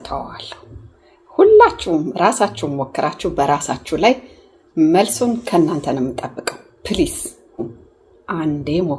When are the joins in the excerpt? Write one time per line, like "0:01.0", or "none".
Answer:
0:07.5